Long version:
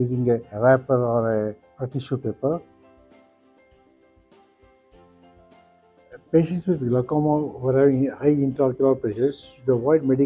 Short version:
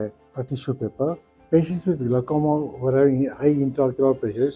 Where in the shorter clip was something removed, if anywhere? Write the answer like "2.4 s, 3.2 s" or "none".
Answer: 1.3 s